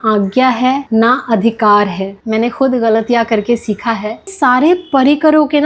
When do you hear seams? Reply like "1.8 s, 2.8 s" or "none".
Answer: 0.8 s, 2.2 s, 4.3 s